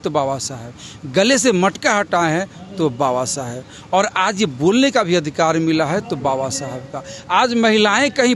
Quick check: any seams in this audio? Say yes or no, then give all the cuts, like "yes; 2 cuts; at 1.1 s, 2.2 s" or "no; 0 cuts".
no; 0 cuts